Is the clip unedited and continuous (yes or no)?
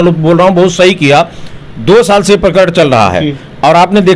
yes